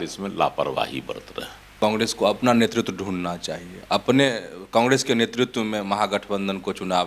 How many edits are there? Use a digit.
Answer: 1